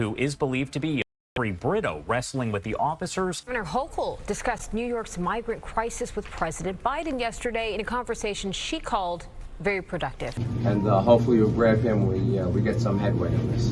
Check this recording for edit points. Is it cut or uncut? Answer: uncut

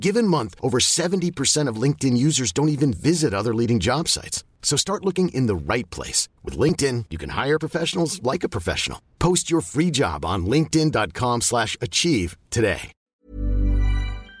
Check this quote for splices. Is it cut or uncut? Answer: cut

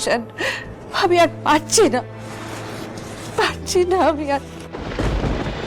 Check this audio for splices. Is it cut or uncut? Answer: cut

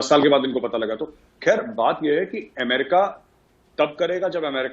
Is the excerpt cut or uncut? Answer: uncut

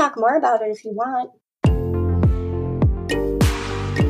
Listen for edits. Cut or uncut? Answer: cut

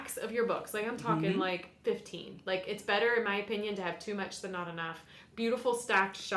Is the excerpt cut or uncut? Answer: uncut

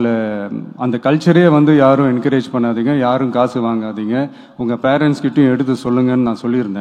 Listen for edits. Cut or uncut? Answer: uncut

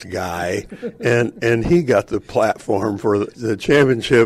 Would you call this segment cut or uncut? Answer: cut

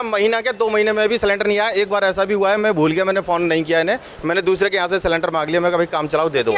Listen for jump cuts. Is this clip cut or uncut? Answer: uncut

